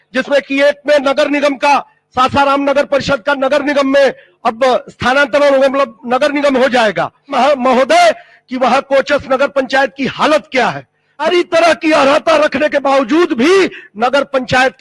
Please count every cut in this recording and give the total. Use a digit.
2